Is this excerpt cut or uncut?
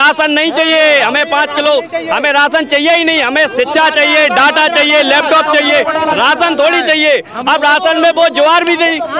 uncut